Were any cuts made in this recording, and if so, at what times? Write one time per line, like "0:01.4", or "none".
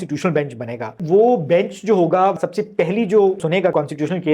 0:01.0
0:02.4
0:03.5